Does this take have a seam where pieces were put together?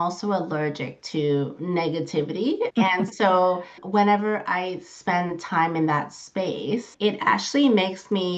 yes; 3 cuts; at 2.7 s, 3.8 s, 6.9 s

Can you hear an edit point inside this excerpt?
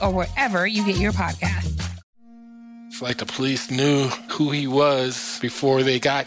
yes; 1 cut; at 2.0 s

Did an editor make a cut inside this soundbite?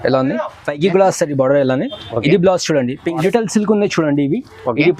yes; 1 cut; at 3.2 s

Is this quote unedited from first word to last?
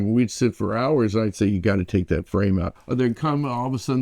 no; 1 cut; at 2.8 s

